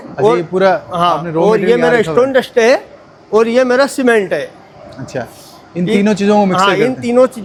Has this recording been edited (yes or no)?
no